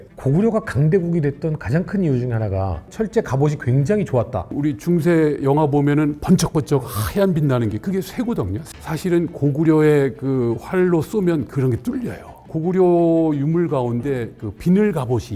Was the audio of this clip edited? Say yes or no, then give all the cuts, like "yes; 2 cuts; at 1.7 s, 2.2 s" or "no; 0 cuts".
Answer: yes; 4 cuts; at 2.9 s, 4.5 s, 8.7 s, 12.4 s